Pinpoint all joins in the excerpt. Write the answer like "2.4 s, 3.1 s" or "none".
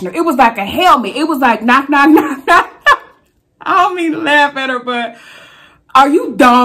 2.7 s